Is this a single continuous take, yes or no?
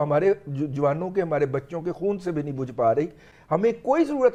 yes